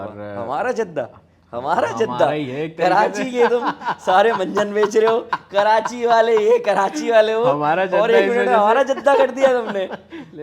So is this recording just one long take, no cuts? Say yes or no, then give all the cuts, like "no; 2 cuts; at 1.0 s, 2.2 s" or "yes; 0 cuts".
yes; 0 cuts